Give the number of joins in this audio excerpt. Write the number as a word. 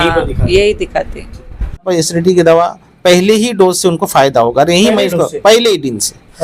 one